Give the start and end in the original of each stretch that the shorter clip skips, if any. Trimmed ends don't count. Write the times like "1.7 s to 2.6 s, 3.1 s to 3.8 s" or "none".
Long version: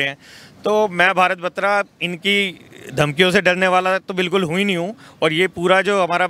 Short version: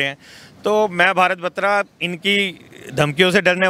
none